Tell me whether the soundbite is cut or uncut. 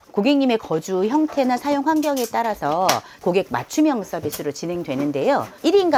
cut